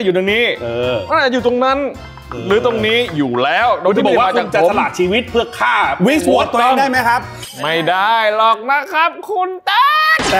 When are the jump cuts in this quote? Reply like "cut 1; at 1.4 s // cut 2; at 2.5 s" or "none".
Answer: cut 1; at 7.4 s